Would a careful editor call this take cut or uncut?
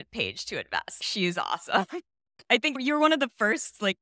cut